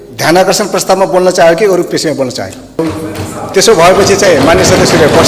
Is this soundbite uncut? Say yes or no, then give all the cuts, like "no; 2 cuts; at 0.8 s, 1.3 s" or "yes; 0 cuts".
no; 1 cut; at 2.8 s